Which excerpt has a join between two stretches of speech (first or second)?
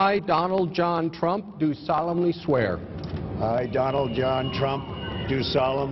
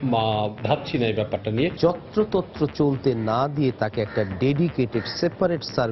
second